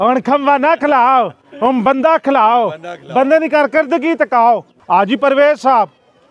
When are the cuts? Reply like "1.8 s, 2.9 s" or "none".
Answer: 4.7 s